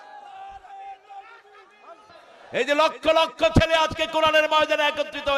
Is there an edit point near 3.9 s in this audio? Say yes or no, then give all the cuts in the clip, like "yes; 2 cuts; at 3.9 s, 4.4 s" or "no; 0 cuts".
no; 1 cut; at 2.2 s